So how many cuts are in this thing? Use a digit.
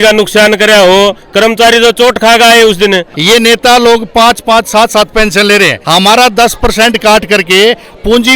2